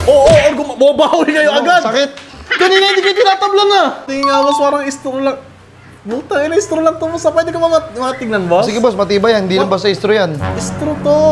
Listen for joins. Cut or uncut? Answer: cut